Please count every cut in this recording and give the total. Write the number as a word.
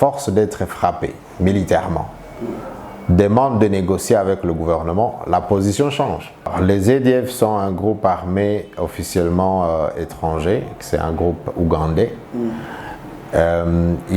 one